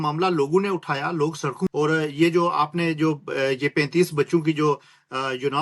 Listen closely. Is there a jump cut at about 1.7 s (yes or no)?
yes